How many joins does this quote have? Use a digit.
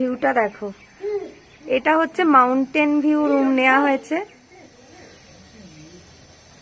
1